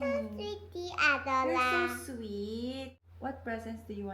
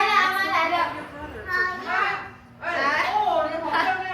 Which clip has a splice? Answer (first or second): first